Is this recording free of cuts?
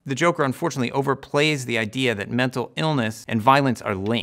no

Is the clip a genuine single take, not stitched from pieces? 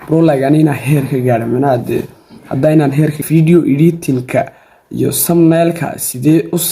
no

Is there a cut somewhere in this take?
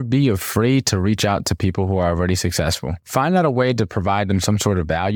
no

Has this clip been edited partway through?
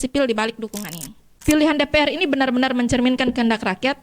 yes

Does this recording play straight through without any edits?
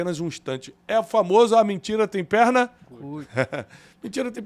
yes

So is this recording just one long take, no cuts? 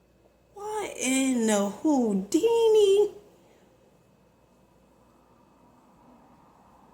yes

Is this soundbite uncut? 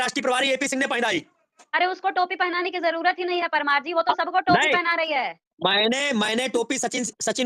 yes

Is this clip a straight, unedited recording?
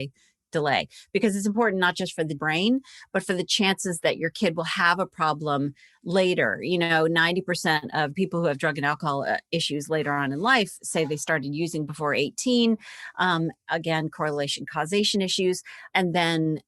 no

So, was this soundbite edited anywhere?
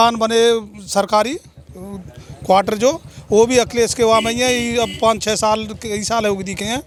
no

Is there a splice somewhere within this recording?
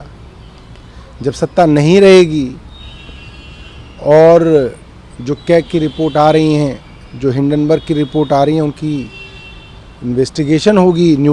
no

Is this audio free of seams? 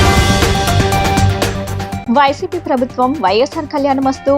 no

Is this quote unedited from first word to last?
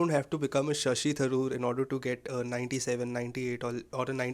yes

